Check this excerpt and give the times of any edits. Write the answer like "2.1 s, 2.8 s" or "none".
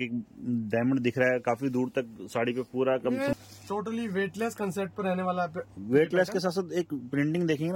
3.3 s

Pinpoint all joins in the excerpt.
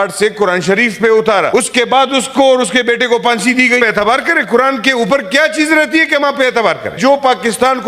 1.5 s, 3.8 s, 7.0 s

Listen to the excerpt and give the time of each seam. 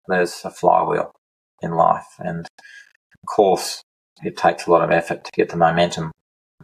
none

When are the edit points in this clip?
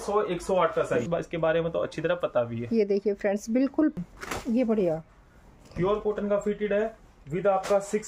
1.1 s, 4.0 s

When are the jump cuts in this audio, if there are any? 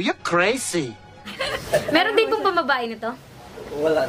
1.4 s

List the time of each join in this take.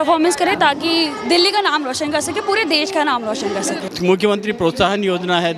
3.9 s

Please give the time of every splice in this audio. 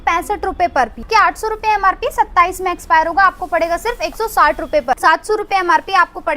1.0 s, 4.9 s

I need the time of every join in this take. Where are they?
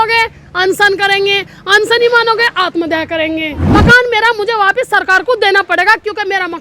3.6 s

